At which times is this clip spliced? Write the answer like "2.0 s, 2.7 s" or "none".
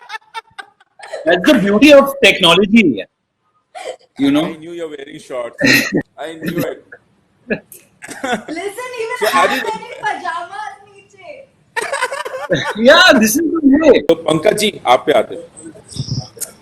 14.1 s